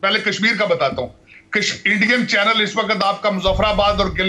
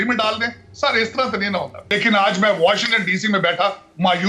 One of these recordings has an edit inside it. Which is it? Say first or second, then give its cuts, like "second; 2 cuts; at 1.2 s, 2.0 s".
second; 1 cut; at 1.8 s